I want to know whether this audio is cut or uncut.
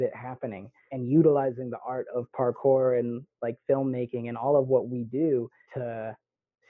cut